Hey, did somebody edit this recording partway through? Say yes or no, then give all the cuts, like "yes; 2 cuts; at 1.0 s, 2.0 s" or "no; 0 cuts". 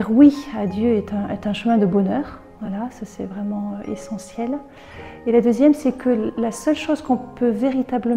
no; 0 cuts